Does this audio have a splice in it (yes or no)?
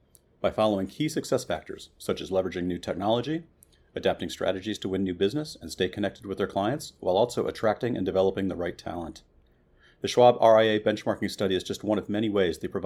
no